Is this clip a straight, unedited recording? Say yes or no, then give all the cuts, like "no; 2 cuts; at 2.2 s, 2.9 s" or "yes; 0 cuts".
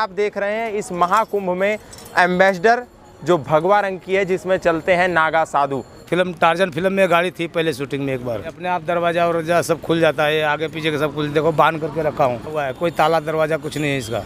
no; 3 cuts; at 6.1 s, 8.5 s, 12.6 s